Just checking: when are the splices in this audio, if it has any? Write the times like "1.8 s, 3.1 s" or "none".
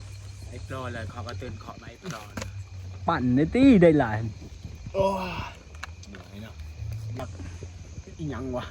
7.2 s

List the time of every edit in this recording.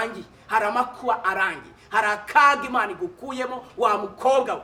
none

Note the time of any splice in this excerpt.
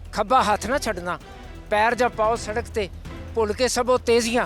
none

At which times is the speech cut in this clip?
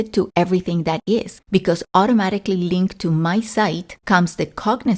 1.4 s, 3.9 s

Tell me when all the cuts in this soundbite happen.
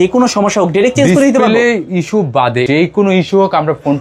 2.7 s

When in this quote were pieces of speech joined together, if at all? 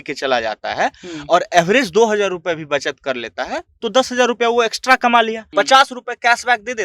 5.4 s

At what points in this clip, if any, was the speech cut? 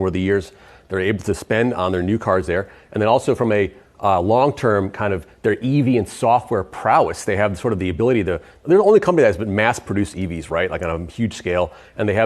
none

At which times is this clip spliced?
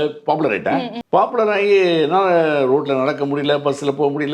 1.0 s

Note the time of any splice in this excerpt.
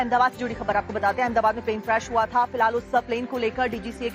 0.9 s

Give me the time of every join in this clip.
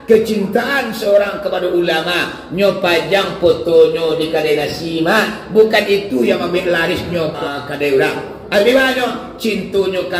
7.4 s

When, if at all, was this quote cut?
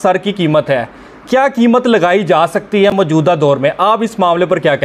none

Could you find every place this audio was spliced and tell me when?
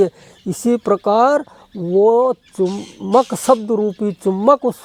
none

